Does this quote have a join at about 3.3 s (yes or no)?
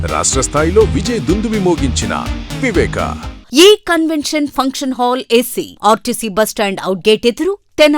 yes